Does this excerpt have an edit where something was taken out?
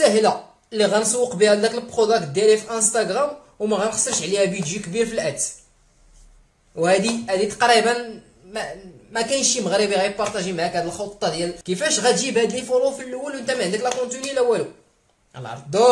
yes; 1 cut; at 11.6 s

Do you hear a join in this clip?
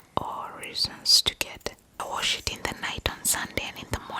yes; 1 cut; at 2.0 s

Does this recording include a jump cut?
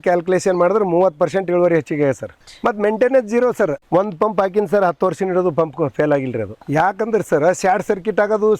yes; 1 cut; at 6.6 s

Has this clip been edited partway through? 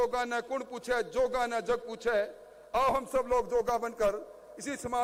no; 0 cuts

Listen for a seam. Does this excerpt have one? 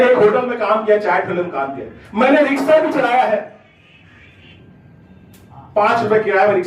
no; 0 cuts

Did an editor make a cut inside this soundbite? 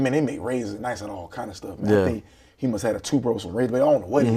no; 0 cuts

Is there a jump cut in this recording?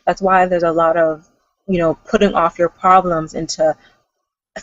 no; 0 cuts

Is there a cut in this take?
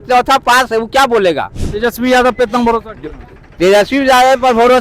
yes; 1 cut; at 1.6 s

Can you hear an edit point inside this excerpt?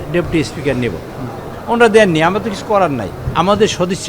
yes; 1 cut; at 3.2 s

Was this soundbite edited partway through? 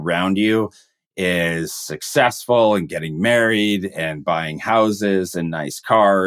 no; 0 cuts

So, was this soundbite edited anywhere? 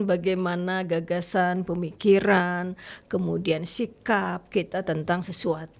no; 0 cuts

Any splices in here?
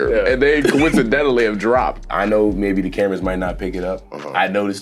yes; 1 cut; at 2.0 s

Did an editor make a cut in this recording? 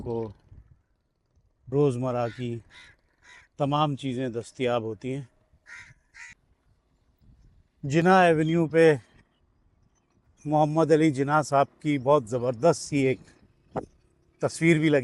yes; 1 cut; at 6.4 s

